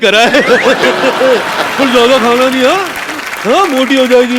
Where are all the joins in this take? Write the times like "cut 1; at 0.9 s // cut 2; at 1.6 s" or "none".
none